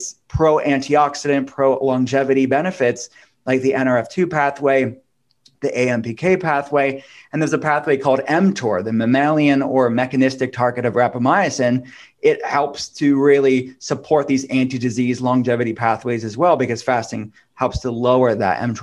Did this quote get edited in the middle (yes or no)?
no